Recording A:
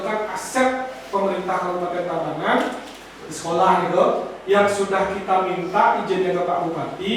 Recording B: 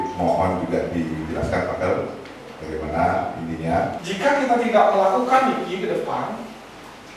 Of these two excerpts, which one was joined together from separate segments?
B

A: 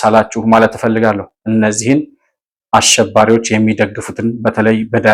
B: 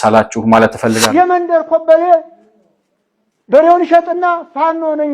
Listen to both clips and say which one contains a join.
B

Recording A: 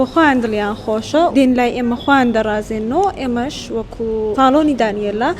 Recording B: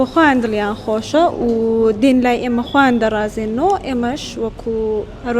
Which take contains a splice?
A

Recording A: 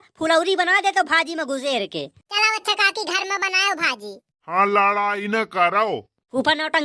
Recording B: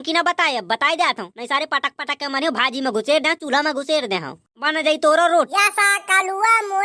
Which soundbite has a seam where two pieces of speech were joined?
B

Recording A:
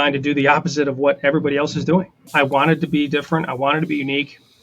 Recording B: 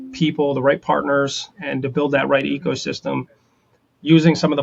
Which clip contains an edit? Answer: A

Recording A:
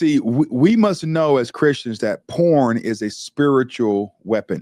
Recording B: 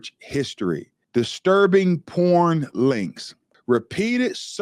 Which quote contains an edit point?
B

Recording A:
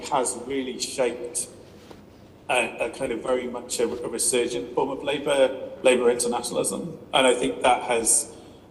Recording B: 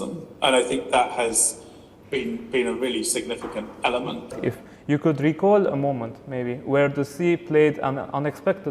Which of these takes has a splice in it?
B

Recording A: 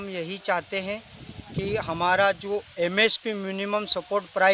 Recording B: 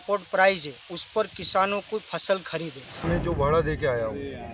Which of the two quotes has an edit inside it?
B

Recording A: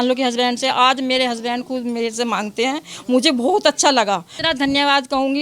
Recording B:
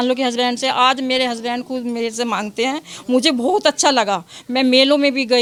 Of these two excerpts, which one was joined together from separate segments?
A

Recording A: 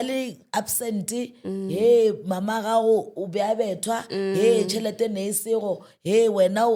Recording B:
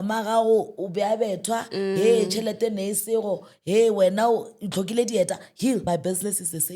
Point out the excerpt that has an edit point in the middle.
B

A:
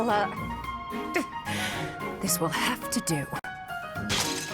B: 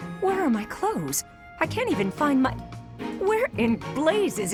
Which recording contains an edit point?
A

